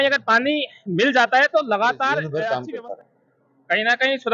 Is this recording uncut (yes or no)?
no